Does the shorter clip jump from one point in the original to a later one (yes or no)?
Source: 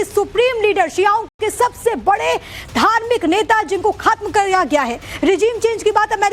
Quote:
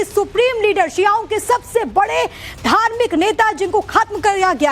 yes